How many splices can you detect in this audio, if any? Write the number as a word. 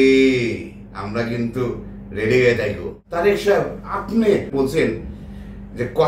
two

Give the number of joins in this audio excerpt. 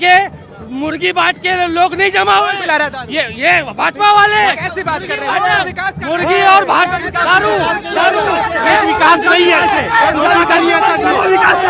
zero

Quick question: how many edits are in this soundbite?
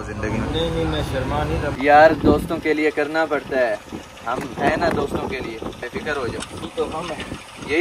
two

